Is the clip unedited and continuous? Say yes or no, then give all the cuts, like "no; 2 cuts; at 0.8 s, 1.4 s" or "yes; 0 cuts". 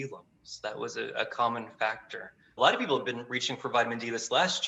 no; 1 cut; at 2.6 s